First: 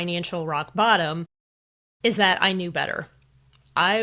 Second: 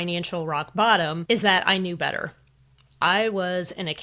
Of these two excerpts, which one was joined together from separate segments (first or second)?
second